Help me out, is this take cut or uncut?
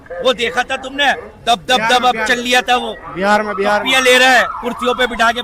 uncut